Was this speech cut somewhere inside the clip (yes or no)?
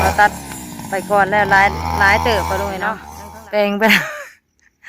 yes